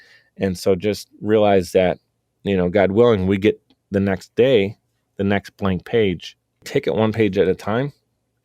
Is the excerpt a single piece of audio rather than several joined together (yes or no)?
no